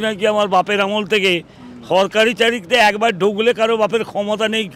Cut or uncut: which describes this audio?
uncut